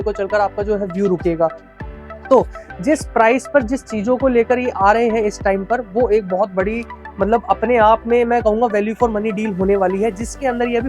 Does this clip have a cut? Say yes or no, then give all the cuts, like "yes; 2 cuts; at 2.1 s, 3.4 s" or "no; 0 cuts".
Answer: no; 0 cuts